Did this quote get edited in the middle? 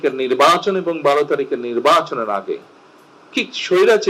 no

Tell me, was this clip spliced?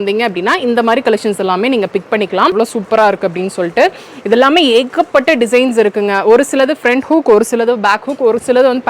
yes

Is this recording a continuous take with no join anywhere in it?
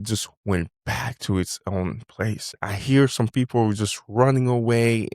no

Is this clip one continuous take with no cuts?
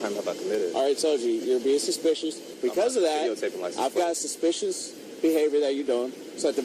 no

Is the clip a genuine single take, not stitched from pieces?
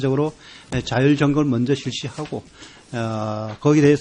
yes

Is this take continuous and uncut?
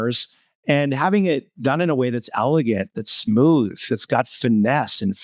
yes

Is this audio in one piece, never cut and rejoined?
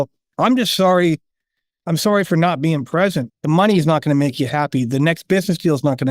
no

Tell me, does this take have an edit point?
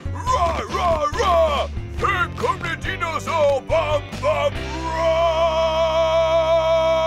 no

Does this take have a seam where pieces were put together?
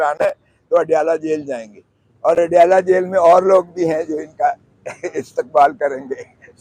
no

